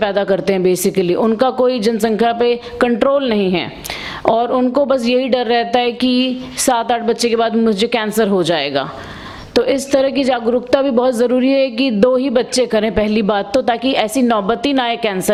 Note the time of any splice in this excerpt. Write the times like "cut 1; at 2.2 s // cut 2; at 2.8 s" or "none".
none